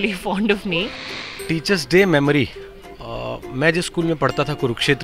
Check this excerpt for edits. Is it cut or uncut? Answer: cut